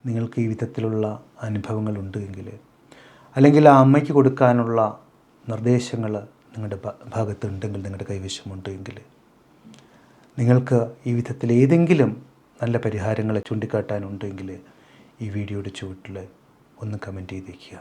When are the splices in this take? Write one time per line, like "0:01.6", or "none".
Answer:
0:13.5